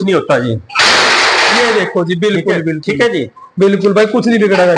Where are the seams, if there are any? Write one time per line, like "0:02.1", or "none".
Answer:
none